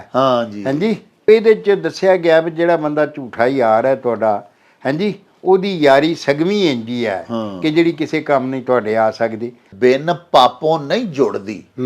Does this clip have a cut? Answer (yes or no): yes